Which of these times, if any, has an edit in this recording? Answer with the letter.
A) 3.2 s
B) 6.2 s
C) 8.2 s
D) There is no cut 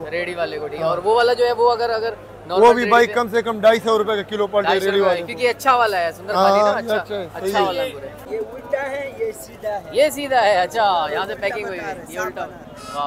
C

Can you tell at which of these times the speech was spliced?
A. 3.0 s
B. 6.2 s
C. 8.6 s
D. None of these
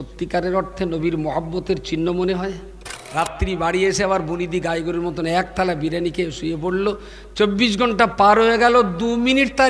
A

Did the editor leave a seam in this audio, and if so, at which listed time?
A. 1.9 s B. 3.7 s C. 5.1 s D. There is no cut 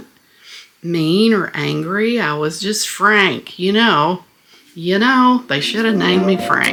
D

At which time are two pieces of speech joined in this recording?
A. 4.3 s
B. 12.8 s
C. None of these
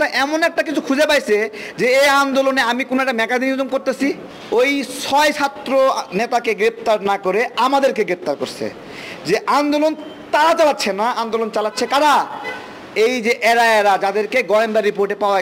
A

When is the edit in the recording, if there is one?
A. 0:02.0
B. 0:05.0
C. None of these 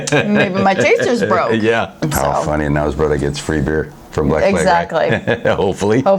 A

